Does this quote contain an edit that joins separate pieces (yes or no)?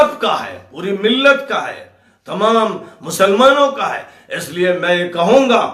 no